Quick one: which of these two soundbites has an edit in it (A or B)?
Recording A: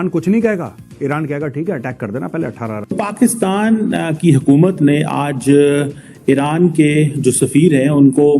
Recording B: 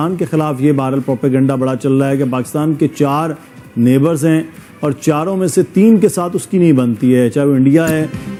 A